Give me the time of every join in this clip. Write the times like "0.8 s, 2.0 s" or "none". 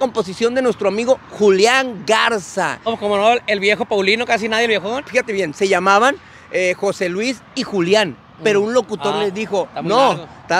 2.9 s, 5.0 s